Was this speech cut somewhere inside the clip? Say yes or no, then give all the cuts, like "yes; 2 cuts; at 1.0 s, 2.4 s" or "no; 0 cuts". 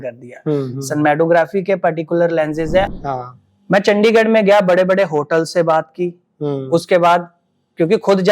yes; 1 cut; at 3.0 s